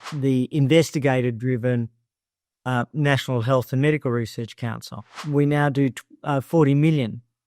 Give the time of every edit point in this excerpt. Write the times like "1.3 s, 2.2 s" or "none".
5.2 s